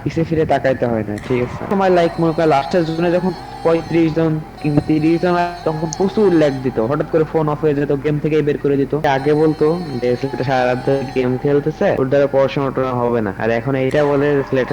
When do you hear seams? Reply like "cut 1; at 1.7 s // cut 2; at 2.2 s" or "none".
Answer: cut 1; at 1.7 s // cut 2; at 9.0 s // cut 3; at 12.0 s // cut 4; at 13.3 s